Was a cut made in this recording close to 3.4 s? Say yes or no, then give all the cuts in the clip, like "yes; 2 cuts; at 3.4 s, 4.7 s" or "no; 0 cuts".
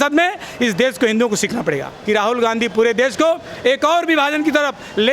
no; 1 cut; at 1.9 s